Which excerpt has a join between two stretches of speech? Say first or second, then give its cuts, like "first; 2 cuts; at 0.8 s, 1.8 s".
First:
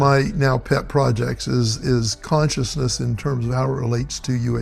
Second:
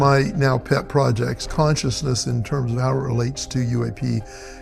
second; 1 cut; at 1.4 s